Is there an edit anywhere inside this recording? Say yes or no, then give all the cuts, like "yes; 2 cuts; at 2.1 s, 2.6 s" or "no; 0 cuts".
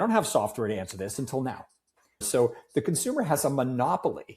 yes; 1 cut; at 2.2 s